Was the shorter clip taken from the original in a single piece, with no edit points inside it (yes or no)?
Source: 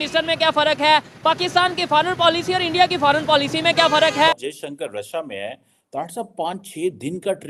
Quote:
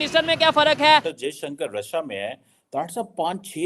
no